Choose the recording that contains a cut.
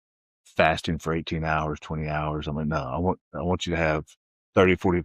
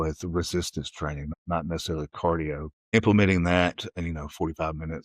second; 2 cuts; at 1.3 s, 2.9 s

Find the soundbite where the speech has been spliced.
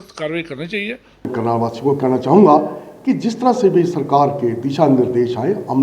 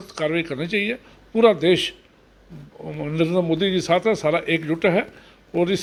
first; 1 cut; at 1.3 s

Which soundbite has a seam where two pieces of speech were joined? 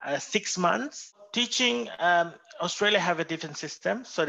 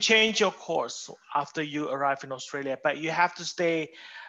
first; 1 cut; at 1.2 s

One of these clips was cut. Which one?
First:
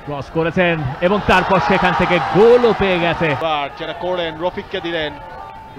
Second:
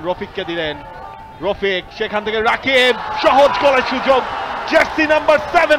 first; 1 cut; at 3.4 s

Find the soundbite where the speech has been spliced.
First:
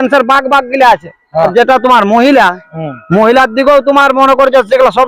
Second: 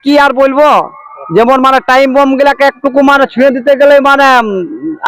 first; 1 cut; at 1.5 s

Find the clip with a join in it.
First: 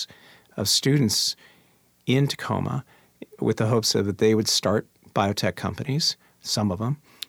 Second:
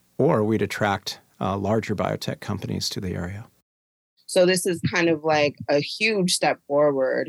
second; 1 cut; at 3.9 s

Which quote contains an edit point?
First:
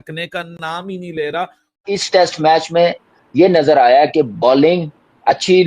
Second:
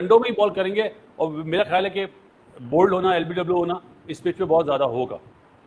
first; 1 cut; at 1.8 s

